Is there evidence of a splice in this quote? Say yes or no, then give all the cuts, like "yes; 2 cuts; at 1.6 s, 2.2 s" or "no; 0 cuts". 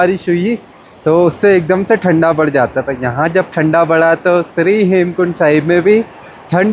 no; 0 cuts